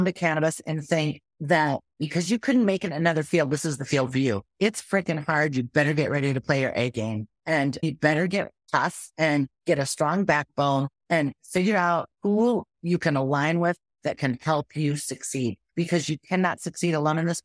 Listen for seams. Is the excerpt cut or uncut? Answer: cut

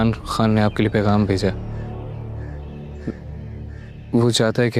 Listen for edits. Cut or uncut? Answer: cut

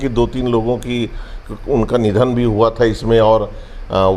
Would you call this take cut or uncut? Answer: uncut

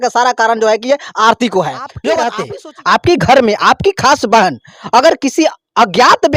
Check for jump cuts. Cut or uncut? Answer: cut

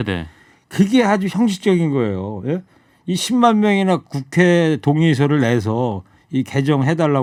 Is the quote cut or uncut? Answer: uncut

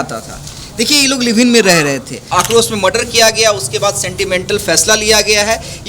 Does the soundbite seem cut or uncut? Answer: cut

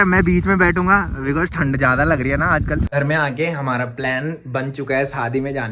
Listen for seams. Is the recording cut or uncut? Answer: cut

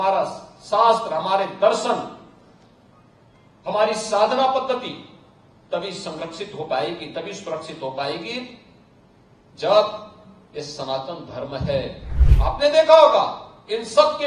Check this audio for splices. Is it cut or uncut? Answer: cut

